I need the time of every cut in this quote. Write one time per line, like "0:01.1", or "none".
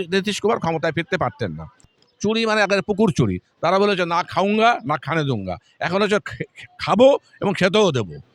0:01.9